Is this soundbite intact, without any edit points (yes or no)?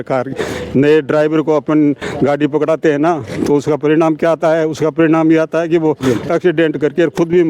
yes